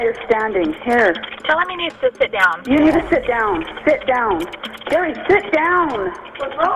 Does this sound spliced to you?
no; 0 cuts

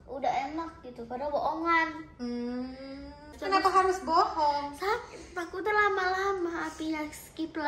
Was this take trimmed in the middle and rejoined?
yes; 1 cut; at 3.3 s

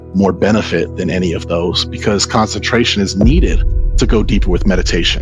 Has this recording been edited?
no; 0 cuts

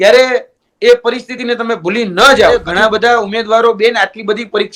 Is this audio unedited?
no; 1 cut; at 2.6 s

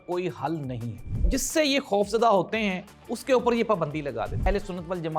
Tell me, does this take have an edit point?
yes; 2 cuts; at 1.2 s, 4.4 s

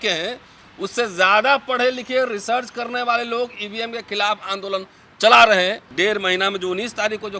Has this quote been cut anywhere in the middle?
yes; 1 cut; at 5.9 s

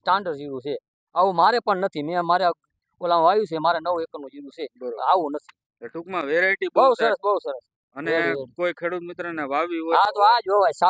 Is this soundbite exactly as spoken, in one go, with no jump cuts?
yes; 0 cuts

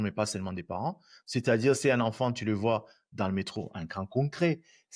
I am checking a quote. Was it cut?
no; 0 cuts

